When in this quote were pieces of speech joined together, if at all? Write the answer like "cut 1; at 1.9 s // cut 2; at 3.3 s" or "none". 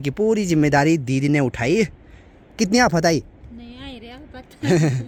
none